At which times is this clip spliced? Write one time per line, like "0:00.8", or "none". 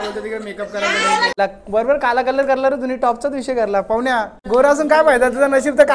0:01.3
0:04.4